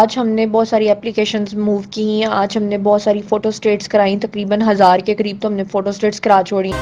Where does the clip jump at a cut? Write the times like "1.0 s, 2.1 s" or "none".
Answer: none

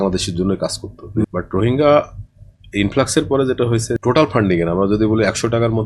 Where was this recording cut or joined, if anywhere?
1.2 s, 4.0 s

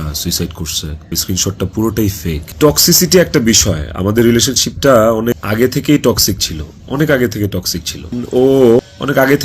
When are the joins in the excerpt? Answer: 1.2 s, 2.4 s, 8.2 s

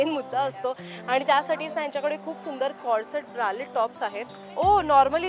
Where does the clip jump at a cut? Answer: 4.4 s

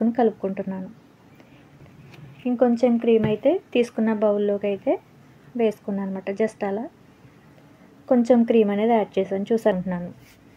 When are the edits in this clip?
1.8 s, 9.7 s

